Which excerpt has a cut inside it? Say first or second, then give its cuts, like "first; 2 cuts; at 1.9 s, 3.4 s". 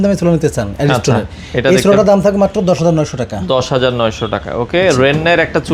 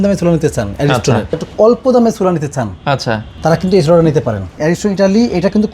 second; 3 cuts; at 1.4 s, 3.3 s, 4.5 s